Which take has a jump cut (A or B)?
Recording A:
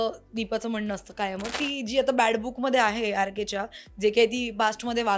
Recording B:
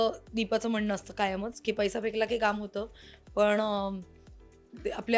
A